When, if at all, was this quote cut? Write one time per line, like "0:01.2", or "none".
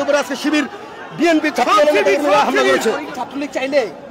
0:03.1